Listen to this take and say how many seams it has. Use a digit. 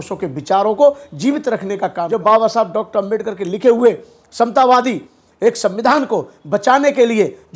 1